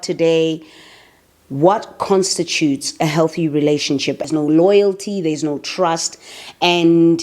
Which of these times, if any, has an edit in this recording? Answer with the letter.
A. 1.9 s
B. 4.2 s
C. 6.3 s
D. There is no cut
B